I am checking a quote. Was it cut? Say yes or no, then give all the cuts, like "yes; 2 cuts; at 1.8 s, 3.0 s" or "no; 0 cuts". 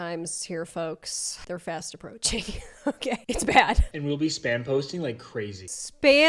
no; 0 cuts